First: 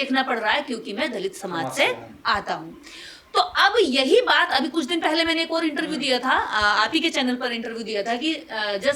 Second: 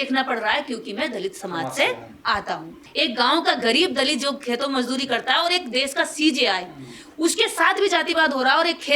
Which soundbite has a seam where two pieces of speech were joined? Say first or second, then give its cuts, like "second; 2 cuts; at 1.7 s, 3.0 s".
second; 1 cut; at 2.8 s